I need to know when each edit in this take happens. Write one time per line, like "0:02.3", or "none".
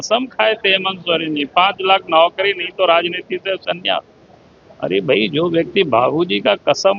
none